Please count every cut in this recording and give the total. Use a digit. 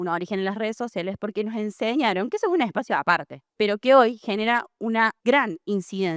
2